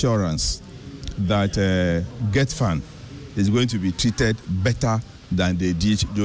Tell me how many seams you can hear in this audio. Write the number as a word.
zero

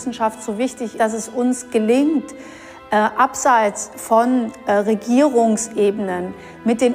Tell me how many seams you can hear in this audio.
one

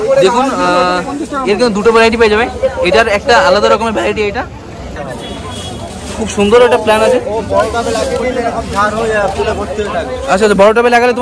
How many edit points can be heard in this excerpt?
one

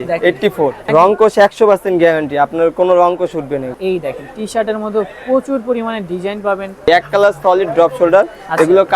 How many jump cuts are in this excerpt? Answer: three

